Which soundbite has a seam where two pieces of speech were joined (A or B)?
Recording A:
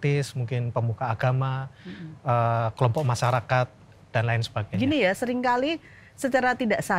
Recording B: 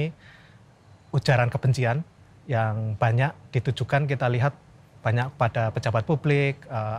A